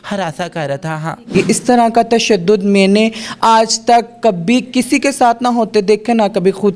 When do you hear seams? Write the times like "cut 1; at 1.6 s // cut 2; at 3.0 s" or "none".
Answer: cut 1; at 1.3 s